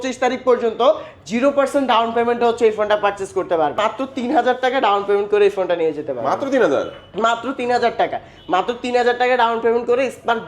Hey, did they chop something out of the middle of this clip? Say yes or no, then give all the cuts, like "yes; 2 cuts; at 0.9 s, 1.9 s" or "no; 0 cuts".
yes; 1 cut; at 3.7 s